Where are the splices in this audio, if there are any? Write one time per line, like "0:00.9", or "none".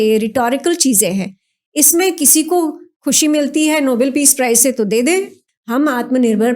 0:05.4